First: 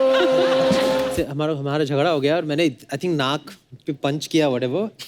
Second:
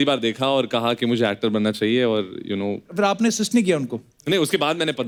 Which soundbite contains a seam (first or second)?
first